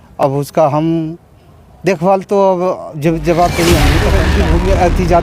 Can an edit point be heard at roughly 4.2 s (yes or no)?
yes